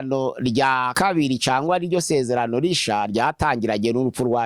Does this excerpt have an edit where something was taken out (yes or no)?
yes